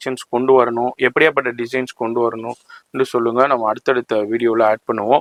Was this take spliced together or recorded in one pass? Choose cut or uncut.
uncut